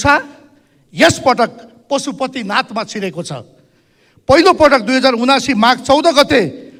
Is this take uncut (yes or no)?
yes